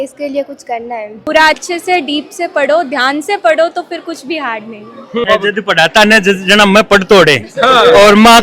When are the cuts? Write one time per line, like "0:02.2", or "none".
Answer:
0:01.3
0:05.1